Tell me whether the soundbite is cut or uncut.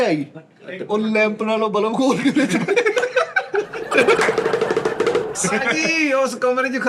cut